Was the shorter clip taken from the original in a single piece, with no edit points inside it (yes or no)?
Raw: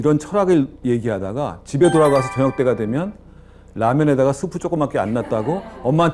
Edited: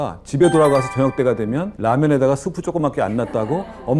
no